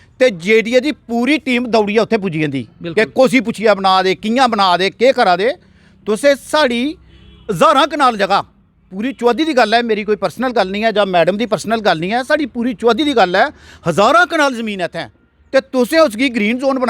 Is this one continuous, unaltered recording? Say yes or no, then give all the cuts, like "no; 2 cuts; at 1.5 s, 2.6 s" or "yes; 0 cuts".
yes; 0 cuts